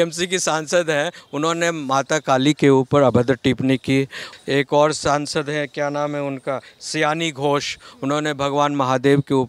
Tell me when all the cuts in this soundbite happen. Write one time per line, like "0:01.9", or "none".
0:04.3